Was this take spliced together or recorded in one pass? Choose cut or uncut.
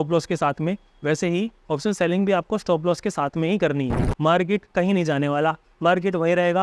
cut